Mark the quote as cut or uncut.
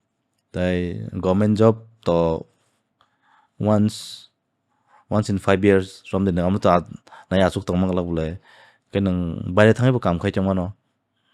uncut